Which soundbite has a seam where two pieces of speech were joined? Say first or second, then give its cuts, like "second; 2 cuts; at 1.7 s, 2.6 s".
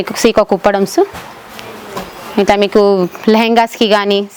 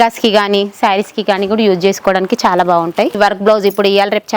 second; 1 cut; at 3.2 s